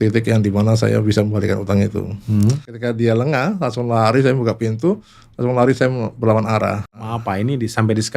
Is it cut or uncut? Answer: cut